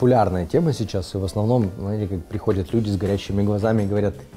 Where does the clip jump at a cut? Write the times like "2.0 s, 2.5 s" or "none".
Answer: none